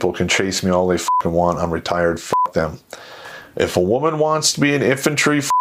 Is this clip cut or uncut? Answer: uncut